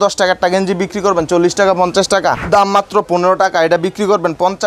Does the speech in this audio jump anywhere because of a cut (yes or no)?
no